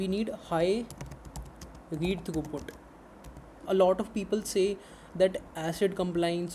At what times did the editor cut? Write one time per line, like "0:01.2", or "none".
0:03.5